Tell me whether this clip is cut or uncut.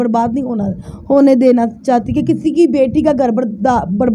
uncut